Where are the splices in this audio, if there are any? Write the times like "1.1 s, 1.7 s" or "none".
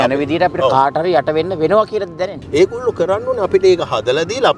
2.4 s